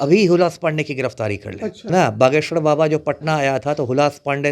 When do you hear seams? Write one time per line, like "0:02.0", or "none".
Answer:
0:01.9